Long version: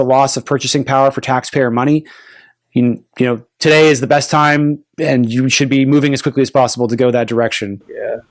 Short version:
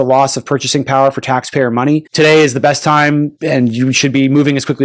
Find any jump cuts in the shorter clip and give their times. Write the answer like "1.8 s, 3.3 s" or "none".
2.1 s, 3.4 s

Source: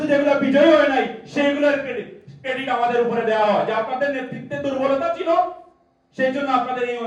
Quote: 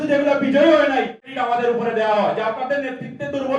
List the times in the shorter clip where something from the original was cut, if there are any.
1.2 s

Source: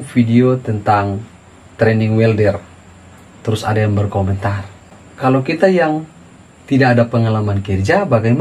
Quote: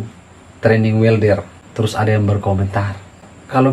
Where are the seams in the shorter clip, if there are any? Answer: 1.6 s

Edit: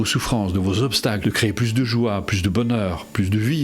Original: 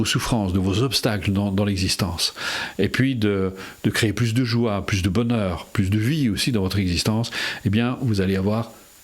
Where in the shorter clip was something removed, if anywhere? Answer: 1.2 s

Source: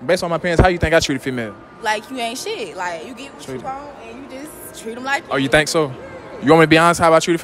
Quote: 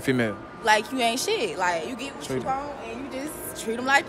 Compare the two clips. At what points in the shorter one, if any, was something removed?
none

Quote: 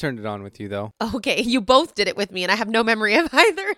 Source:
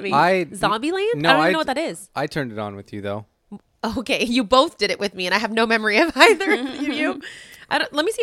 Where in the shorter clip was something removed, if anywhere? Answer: 0.9 s

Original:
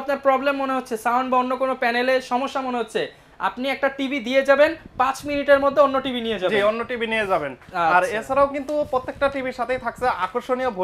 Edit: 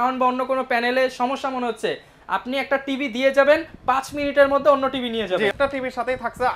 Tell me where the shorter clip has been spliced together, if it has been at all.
5.5 s

